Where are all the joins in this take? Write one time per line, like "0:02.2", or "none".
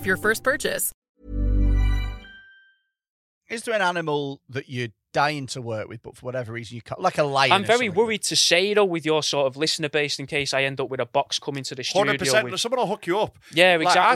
0:00.9
0:03.3